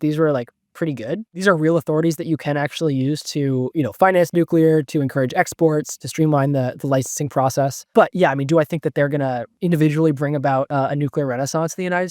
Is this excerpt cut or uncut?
cut